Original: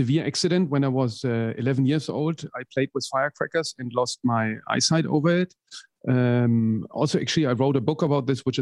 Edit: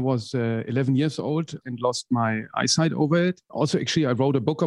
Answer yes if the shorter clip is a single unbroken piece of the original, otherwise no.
no